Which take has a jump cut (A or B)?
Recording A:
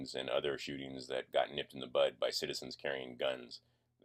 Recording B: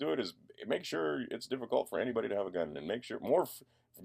B